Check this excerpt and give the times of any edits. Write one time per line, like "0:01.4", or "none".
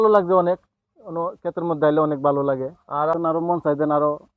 0:03.1